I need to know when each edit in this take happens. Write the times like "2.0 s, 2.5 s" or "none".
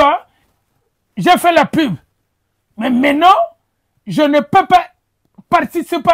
none